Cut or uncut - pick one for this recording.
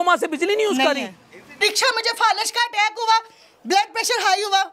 cut